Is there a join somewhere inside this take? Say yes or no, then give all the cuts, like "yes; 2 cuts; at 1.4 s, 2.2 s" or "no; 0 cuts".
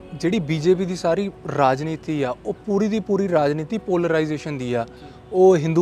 no; 0 cuts